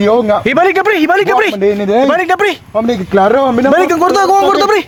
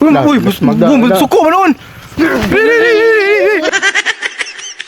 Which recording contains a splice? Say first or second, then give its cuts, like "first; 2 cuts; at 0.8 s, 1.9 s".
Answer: second; 1 cut; at 3.7 s